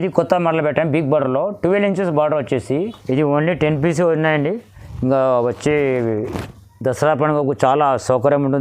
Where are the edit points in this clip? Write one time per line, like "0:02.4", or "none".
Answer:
0:03.0